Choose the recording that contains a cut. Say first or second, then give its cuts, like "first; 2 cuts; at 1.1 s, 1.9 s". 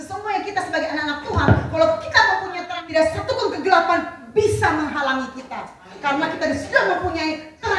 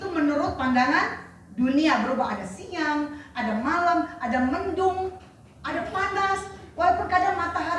first; 1 cut; at 2.7 s